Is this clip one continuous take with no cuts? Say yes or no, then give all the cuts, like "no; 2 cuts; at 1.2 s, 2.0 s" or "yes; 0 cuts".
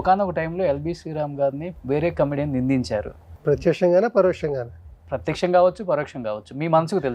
no; 2 cuts; at 1.7 s, 3.3 s